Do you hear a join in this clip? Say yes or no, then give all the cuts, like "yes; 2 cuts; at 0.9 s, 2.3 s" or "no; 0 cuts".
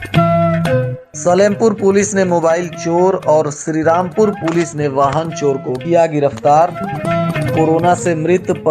yes; 1 cut; at 1.0 s